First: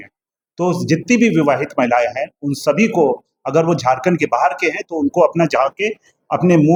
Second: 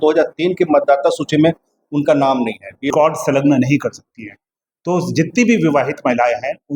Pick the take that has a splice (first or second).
second